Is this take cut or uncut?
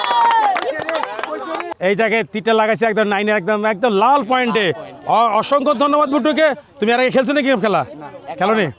cut